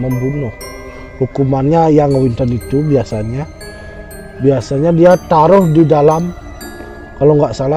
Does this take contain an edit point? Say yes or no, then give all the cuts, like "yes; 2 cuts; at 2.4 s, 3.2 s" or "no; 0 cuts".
no; 0 cuts